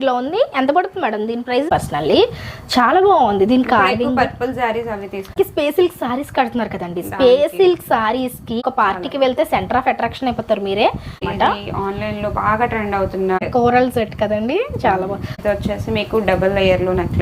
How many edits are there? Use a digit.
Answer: 6